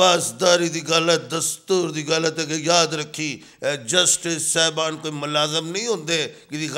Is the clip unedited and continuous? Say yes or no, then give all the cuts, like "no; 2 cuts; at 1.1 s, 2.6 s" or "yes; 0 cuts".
yes; 0 cuts